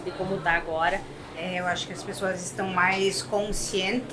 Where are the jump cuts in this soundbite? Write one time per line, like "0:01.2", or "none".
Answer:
0:01.2